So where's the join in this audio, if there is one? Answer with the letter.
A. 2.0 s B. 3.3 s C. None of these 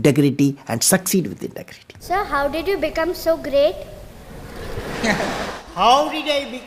A